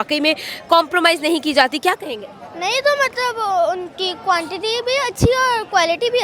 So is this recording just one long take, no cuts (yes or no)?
yes